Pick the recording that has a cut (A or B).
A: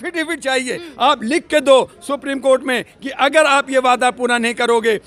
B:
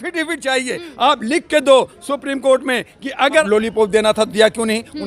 B